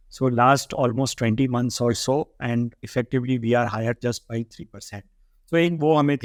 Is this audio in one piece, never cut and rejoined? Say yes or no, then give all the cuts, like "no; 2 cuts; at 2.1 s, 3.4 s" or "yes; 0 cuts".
yes; 0 cuts